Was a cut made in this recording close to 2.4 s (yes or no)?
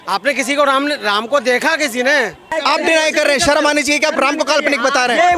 yes